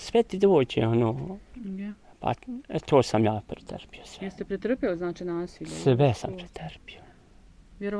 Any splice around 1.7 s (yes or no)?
no